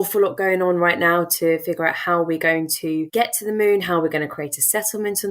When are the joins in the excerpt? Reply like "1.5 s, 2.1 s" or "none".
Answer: 3.1 s